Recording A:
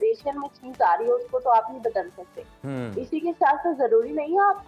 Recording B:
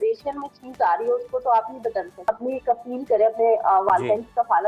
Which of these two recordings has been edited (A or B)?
B